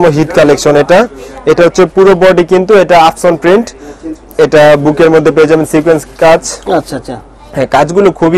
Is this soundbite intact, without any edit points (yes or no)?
yes